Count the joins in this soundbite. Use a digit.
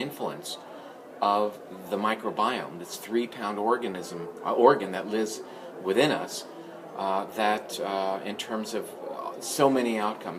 0